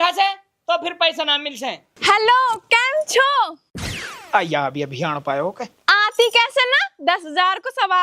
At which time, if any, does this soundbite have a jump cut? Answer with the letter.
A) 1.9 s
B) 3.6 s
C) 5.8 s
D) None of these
A